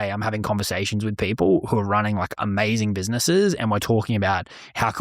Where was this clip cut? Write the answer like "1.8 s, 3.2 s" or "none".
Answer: none

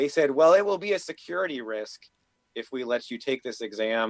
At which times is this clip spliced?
none

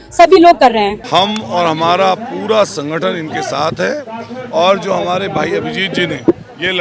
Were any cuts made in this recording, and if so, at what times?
1.0 s

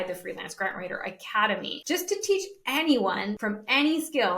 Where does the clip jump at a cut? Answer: 1.7 s, 3.4 s

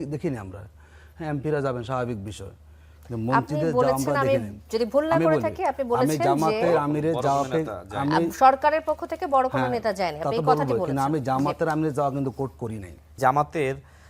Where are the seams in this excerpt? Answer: 13.1 s

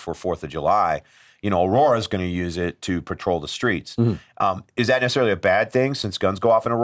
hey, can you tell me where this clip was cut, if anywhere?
none

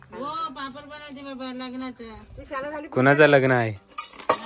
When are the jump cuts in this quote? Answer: none

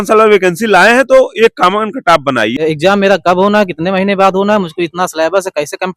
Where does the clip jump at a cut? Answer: 2.5 s

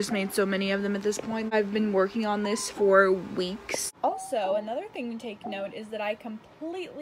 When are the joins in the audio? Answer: 1.5 s, 4.0 s

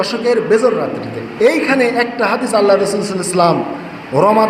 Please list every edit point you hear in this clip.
1.2 s

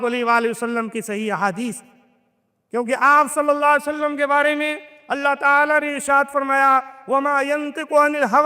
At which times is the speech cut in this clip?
none

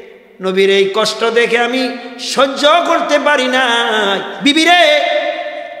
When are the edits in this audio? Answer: 4.3 s

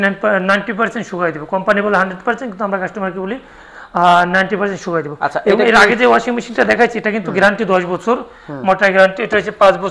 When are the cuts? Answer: none

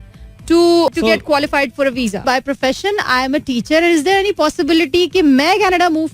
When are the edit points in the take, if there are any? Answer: 0.9 s, 2.2 s

